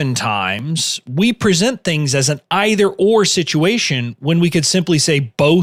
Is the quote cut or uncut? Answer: uncut